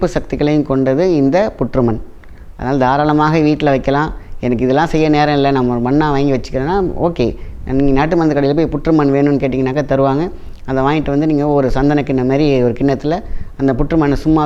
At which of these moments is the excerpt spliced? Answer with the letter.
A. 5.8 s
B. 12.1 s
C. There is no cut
C